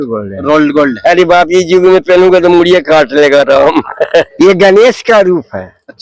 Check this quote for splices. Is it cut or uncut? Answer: cut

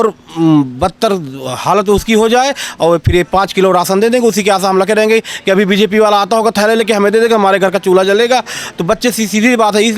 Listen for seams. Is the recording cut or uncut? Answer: uncut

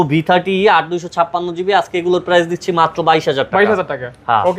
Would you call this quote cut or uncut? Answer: uncut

